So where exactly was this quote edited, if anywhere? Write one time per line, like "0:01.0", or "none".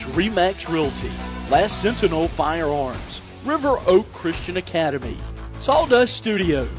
none